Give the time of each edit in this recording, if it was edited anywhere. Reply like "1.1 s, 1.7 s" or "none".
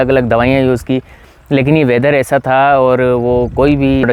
none